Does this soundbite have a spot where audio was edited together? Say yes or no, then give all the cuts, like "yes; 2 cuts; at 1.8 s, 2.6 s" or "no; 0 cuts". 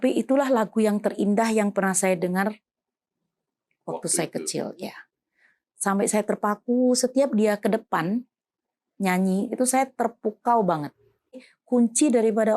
yes; 1 cut; at 11.5 s